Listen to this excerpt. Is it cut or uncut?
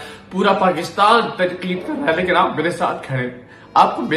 uncut